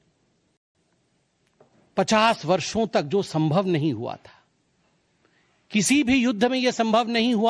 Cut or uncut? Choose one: uncut